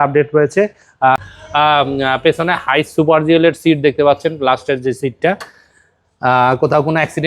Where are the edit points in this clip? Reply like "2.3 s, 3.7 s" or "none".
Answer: 1.2 s